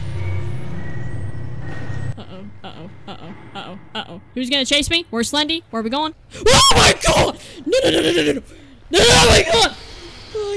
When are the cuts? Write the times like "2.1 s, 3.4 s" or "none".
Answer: 6.2 s